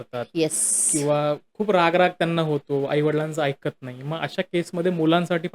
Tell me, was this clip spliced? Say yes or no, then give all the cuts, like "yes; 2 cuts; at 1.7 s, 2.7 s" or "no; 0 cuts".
no; 0 cuts